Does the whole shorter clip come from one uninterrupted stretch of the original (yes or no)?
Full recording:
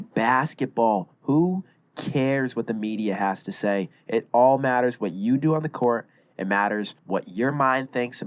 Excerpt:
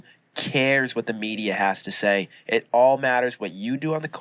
yes